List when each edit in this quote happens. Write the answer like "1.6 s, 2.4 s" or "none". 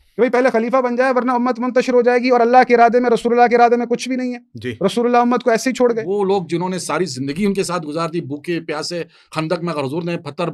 6.1 s